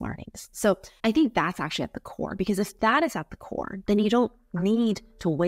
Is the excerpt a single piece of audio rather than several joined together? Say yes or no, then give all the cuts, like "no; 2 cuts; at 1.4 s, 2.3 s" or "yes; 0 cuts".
no; 1 cut; at 3.7 s